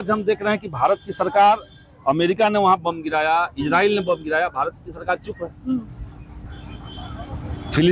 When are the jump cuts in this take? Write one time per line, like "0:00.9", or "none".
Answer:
none